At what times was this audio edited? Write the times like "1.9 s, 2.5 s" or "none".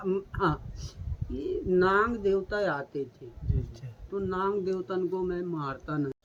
none